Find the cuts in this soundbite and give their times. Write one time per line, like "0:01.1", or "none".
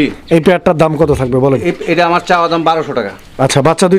none